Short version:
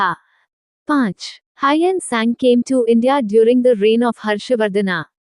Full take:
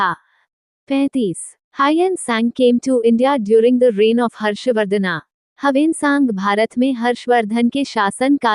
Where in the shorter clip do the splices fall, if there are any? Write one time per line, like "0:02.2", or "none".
0:00.9